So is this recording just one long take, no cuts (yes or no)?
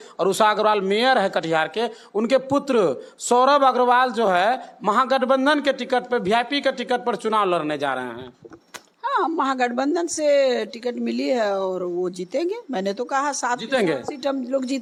yes